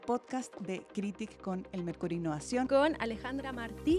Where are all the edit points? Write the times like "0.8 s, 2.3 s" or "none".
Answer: 2.7 s